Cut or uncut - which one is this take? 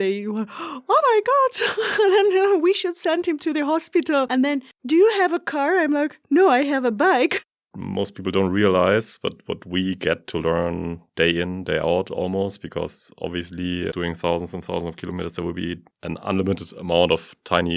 cut